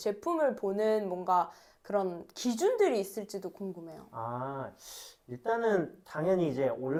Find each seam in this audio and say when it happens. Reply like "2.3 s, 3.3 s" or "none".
none